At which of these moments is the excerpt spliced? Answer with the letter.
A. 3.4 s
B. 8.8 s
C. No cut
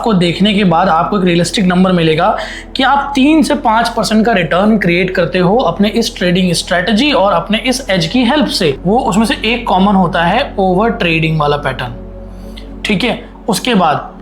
B